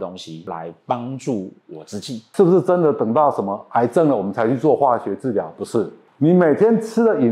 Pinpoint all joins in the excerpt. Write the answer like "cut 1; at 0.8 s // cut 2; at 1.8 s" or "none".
cut 1; at 2.2 s